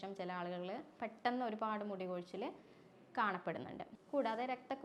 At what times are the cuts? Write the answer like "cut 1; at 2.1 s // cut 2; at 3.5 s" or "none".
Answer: cut 1; at 3.9 s